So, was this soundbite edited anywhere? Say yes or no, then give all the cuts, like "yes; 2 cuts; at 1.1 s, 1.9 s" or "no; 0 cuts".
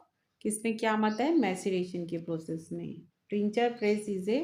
no; 0 cuts